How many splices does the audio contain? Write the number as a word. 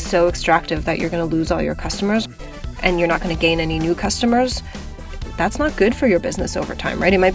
one